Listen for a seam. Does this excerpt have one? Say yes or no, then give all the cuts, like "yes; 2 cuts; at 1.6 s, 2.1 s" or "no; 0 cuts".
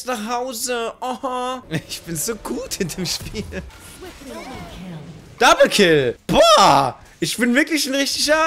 yes; 2 cuts; at 3.7 s, 5.3 s